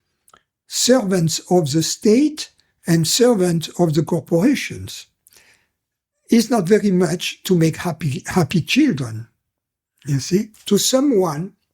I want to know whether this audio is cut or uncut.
cut